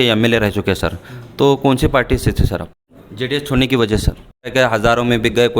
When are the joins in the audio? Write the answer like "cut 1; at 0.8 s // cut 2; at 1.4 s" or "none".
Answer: cut 1; at 2.8 s // cut 2; at 4.5 s